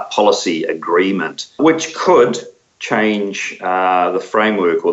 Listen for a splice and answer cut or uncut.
cut